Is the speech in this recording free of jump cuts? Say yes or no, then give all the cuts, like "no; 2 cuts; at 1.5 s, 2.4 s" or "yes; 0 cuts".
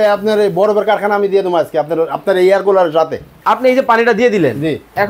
no; 1 cut; at 3.3 s